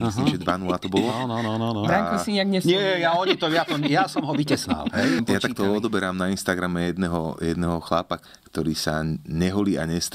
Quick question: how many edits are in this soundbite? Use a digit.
2